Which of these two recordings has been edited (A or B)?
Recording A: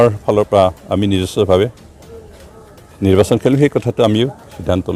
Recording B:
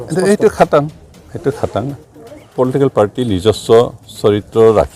B